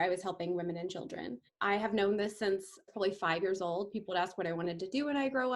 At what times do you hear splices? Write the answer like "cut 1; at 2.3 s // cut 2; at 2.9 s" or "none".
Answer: cut 1; at 1.5 s // cut 2; at 2.9 s